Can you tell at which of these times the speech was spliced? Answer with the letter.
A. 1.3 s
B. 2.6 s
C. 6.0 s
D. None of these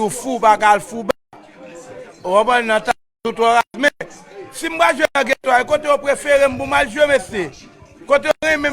C